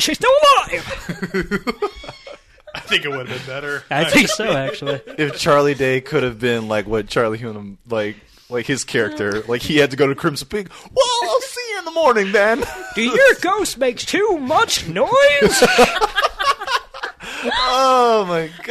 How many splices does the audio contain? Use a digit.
0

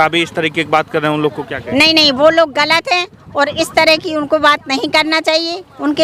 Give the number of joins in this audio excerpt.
0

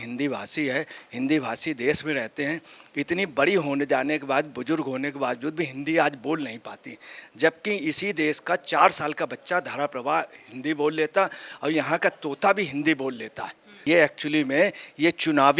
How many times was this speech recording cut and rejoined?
1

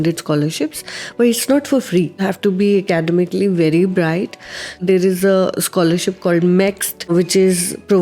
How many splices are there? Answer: 3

